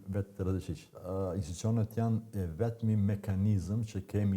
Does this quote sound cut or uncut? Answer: cut